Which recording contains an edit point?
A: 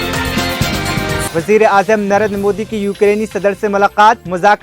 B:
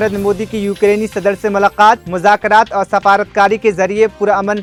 A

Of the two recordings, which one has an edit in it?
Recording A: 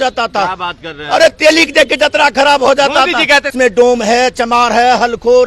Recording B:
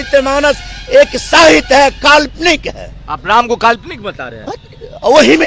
A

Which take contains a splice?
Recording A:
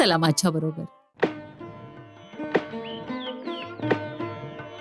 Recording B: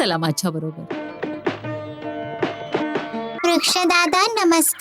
B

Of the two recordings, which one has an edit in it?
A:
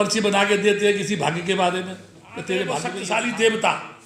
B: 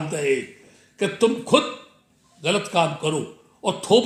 A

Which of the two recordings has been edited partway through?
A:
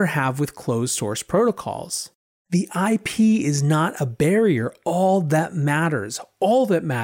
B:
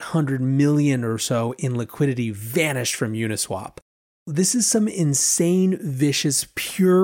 B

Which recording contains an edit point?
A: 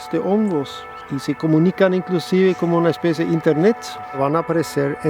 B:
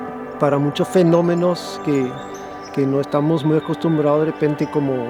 A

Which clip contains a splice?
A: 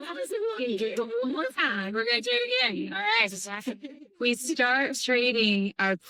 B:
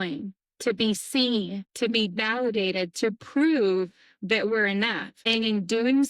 B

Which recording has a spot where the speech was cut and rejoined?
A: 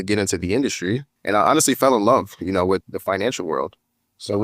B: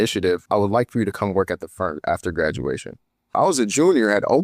A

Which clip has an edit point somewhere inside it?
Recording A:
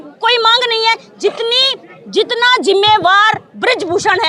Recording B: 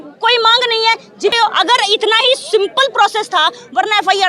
B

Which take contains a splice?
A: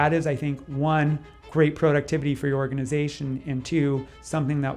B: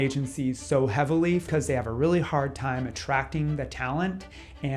B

